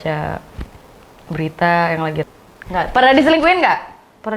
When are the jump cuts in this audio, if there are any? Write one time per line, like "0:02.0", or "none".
0:02.2